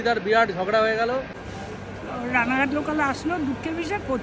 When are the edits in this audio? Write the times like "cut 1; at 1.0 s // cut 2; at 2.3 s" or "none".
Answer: cut 1; at 1.4 s

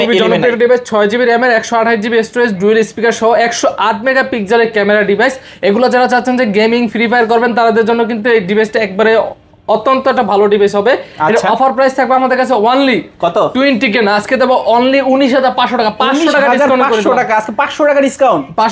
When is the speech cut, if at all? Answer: none

